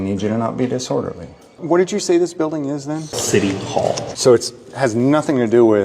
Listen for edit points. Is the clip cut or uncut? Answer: cut